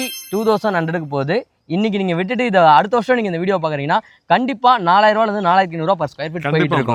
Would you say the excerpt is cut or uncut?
uncut